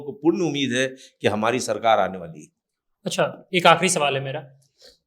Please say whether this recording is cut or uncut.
uncut